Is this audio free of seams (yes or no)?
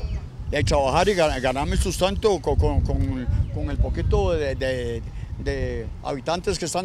yes